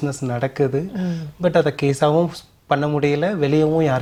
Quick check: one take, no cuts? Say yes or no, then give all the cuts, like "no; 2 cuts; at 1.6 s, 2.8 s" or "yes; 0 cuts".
yes; 0 cuts